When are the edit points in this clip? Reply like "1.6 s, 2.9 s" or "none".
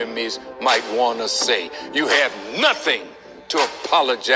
2.6 s